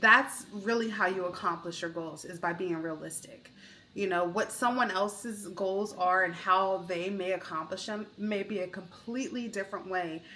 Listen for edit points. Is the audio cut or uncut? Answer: uncut